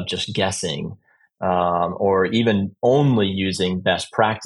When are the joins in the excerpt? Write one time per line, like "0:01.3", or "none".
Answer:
none